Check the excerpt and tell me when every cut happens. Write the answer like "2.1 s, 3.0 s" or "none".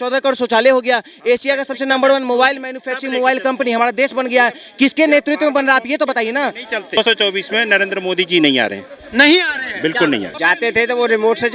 7.0 s, 10.3 s